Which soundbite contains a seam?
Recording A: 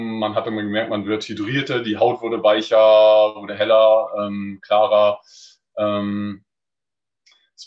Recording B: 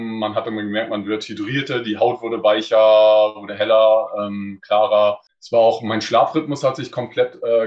B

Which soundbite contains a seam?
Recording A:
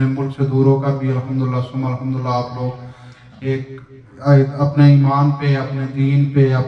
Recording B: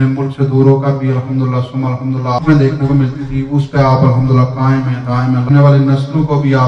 B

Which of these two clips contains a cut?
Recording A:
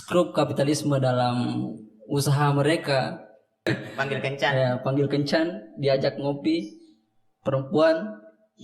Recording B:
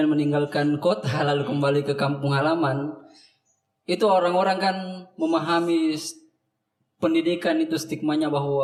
A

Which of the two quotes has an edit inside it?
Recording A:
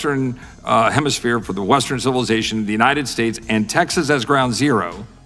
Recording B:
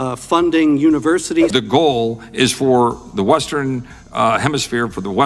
B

